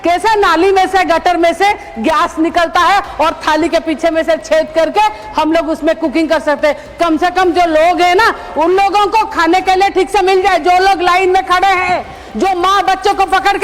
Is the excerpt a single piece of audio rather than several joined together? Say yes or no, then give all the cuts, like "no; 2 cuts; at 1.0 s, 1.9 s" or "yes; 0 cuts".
yes; 0 cuts